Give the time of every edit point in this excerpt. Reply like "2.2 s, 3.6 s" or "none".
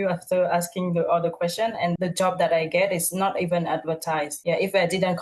none